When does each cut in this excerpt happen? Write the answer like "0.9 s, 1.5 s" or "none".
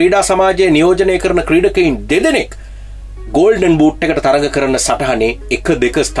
none